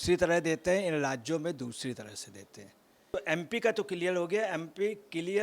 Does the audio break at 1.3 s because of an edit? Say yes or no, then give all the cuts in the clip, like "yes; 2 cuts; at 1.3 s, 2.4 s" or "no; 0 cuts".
no; 1 cut; at 3.1 s